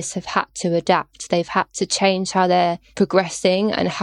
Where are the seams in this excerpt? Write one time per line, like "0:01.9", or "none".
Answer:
0:02.9